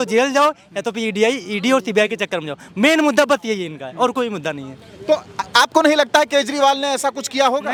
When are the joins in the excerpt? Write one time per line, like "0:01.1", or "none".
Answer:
none